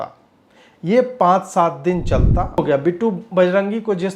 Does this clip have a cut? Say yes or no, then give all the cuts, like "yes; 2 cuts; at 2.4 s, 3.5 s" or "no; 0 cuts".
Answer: yes; 1 cut; at 2.6 s